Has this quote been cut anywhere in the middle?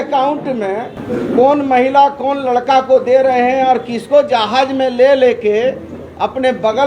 yes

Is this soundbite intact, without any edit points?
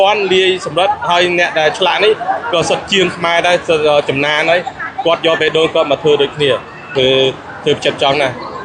no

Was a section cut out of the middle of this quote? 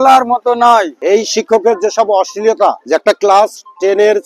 yes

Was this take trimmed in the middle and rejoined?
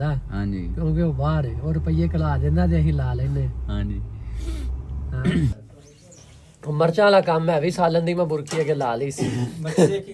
yes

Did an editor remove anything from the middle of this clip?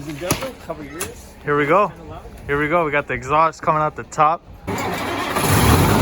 yes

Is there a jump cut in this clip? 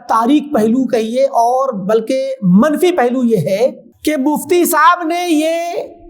yes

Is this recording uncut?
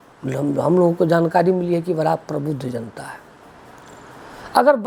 yes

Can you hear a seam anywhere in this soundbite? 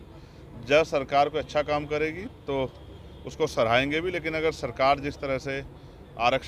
no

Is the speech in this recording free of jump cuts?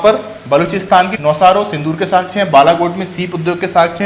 no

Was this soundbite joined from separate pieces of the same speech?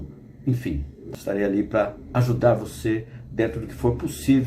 yes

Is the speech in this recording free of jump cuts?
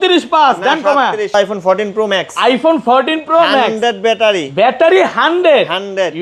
no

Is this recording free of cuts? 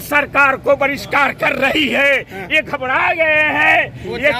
yes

